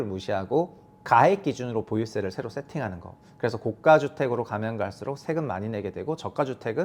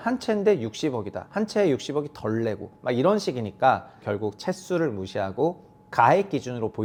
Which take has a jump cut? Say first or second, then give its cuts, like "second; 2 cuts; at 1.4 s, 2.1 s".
first; 1 cut; at 3.1 s